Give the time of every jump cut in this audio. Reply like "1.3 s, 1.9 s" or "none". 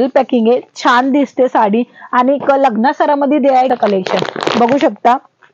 3.7 s